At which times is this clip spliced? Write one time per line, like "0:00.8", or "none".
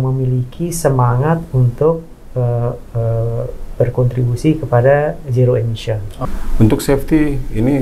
0:06.1